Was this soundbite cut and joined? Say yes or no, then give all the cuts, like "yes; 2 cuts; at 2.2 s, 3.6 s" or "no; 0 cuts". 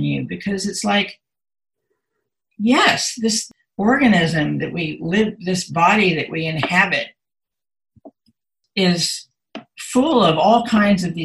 yes; 2 cuts; at 3.5 s, 8.6 s